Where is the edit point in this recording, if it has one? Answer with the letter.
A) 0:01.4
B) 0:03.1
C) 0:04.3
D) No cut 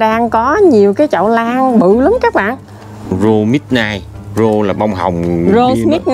B